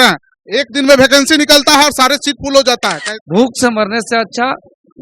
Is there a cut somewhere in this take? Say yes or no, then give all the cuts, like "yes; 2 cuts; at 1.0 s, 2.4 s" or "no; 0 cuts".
yes; 1 cut; at 3.0 s